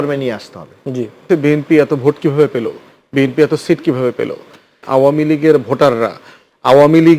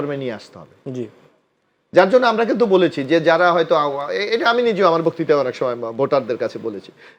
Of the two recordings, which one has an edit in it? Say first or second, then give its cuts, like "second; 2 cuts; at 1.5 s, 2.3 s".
first; 2 cuts; at 1.2 s, 4.8 s